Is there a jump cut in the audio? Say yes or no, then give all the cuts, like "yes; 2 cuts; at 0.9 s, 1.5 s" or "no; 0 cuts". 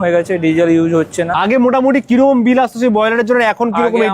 yes; 1 cut; at 1.3 s